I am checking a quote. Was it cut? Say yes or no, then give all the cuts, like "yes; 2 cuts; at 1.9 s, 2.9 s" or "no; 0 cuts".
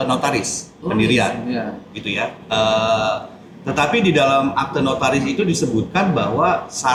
no; 0 cuts